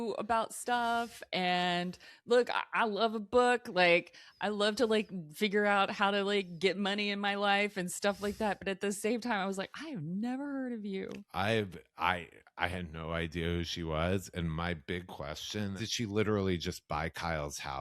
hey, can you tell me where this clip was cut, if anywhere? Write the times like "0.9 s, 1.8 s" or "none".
15.8 s